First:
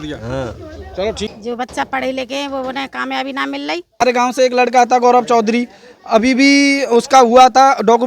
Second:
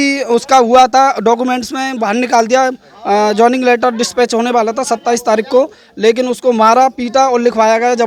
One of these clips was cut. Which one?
first; 2 cuts; at 1.3 s, 4.0 s

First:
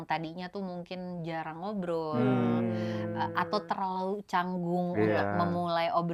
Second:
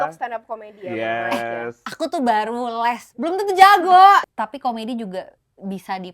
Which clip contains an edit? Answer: second; 1 cut; at 4.2 s

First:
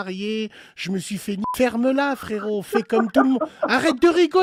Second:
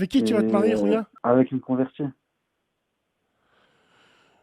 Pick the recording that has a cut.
second; 1 cut; at 1.1 s

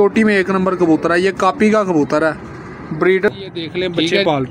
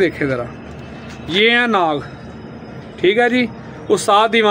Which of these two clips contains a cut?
first; 1 cut; at 3.3 s

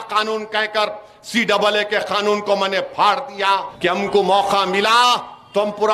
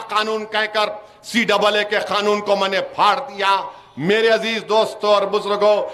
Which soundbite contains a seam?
first; 1 cut; at 3.7 s

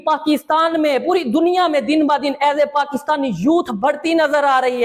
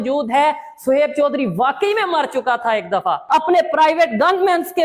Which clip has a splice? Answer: second; 1 cut; at 3.2 s

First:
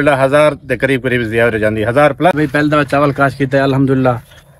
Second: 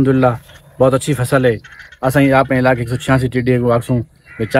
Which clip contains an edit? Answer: first; 1 cut; at 2.4 s

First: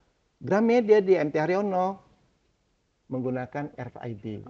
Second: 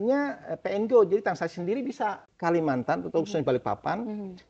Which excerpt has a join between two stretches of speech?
second; 1 cut; at 2.3 s

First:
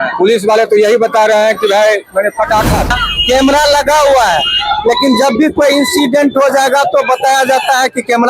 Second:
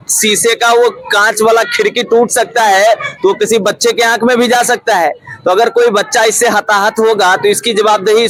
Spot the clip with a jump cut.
first; 1 cut; at 2.9 s

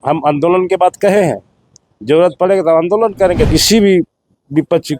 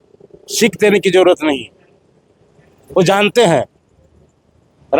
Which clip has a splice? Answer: first; 1 cut; at 3.5 s

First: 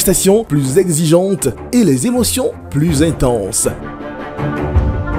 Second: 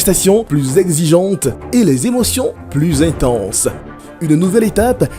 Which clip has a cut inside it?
second; 1 cut; at 4.1 s

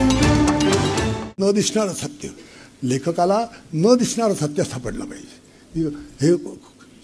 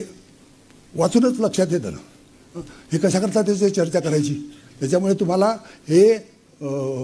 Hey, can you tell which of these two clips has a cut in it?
first; 1 cut; at 1.1 s

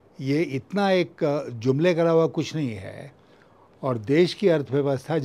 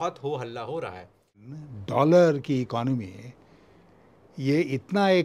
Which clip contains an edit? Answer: second; 1 cut; at 1.4 s

